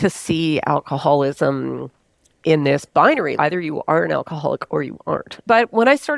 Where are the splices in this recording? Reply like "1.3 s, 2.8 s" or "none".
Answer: 3.3 s, 5.3 s